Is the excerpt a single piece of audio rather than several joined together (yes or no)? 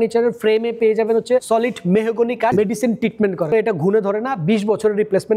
no